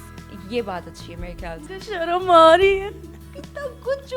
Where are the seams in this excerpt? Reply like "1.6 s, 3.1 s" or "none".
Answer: 1.5 s